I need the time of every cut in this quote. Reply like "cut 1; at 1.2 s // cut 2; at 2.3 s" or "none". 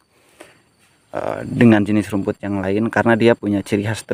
none

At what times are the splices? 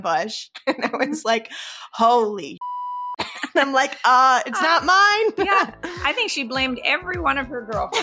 none

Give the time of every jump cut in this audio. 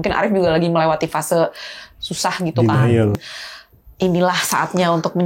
cut 1; at 3.2 s

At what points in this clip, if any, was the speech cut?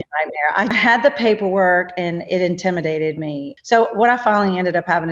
cut 1; at 0.7 s // cut 2; at 3.5 s

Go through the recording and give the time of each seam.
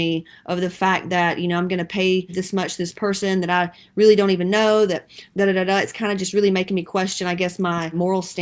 cut 1; at 2.4 s

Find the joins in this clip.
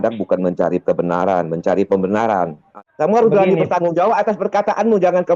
cut 1; at 2.6 s

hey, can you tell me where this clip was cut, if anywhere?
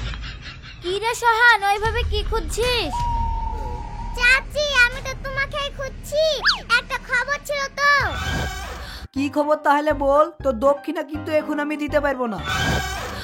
cut 1; at 9.0 s

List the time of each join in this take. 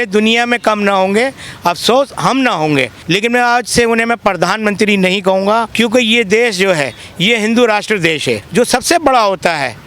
cut 1; at 3.0 s // cut 2; at 5.7 s // cut 3; at 8.4 s

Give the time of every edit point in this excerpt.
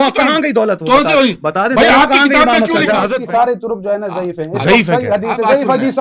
cut 1; at 3.1 s

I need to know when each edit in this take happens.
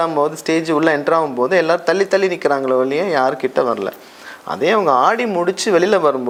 none

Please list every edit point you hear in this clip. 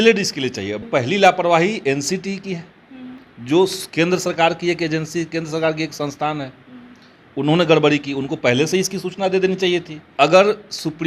cut 1; at 0.9 s // cut 2; at 10.0 s

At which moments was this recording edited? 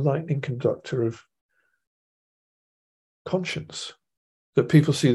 none

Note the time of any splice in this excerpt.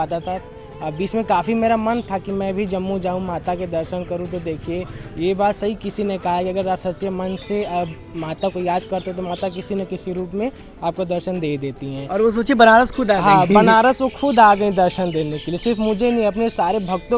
none

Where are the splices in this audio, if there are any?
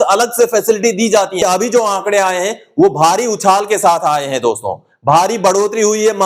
cut 1; at 1.4 s

